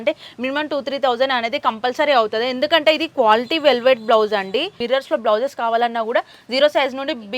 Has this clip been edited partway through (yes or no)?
yes